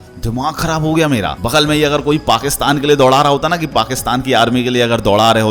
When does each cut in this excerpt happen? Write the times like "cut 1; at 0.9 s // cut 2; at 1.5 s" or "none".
cut 1; at 1.4 s